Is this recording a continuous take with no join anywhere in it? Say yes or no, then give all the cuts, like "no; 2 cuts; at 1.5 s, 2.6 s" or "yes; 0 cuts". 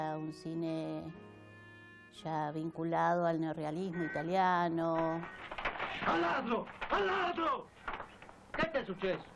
yes; 0 cuts